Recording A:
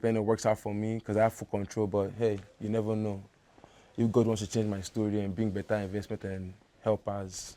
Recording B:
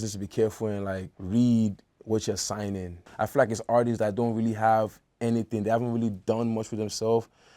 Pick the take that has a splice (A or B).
B